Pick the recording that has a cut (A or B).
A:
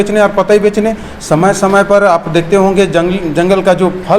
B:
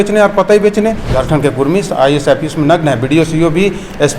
B